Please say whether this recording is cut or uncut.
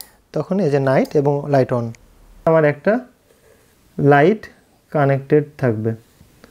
cut